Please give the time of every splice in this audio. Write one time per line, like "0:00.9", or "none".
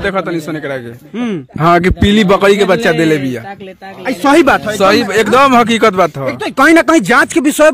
none

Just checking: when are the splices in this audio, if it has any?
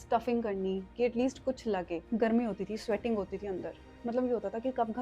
0:02.1

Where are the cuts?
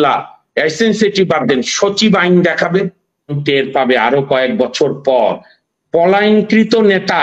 0:03.4

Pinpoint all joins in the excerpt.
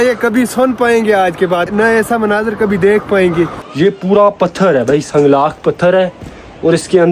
0:01.7
0:03.7

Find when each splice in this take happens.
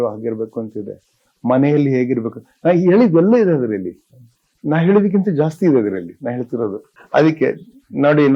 0:06.9

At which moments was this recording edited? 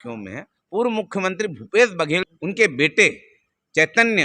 0:02.3

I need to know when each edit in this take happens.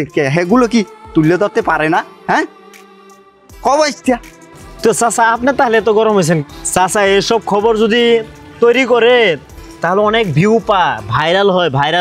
none

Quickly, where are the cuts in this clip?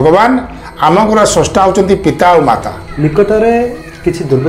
0:02.8

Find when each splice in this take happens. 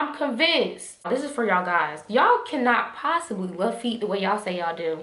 0:01.1

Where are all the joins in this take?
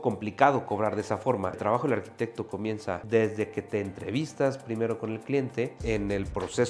0:01.6
0:03.0
0:05.8

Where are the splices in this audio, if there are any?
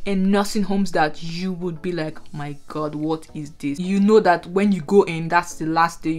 0:03.8

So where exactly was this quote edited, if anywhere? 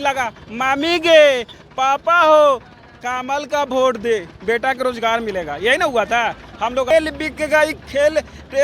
0:06.9

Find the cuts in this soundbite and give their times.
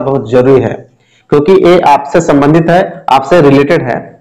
none

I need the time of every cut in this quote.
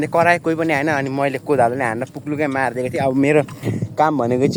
none

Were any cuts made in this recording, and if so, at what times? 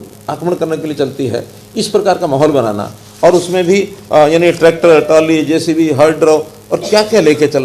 none

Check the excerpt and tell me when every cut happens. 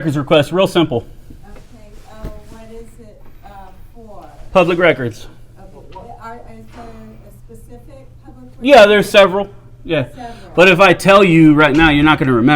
none

